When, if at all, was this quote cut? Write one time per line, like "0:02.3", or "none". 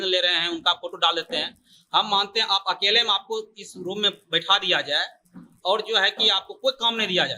none